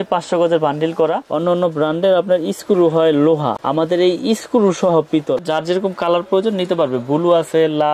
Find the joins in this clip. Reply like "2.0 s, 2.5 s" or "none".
1.2 s, 5.4 s